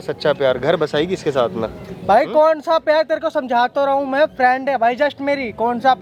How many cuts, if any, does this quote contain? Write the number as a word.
zero